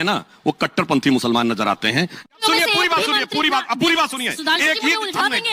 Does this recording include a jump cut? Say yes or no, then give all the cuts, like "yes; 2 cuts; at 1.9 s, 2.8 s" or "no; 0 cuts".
yes; 1 cut; at 2.2 s